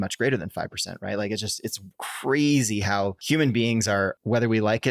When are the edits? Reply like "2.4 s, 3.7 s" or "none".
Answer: 3.2 s, 4.1 s